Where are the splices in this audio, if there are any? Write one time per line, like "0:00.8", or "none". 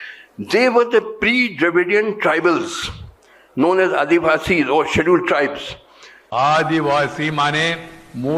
0:06.3